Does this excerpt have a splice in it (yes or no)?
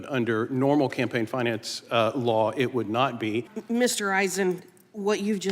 yes